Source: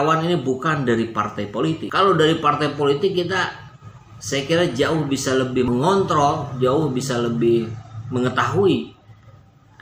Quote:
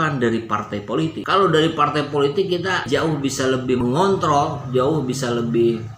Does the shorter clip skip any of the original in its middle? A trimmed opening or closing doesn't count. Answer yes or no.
yes